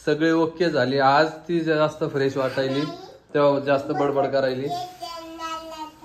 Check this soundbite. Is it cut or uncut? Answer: uncut